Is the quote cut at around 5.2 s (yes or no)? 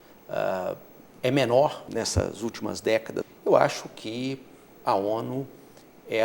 no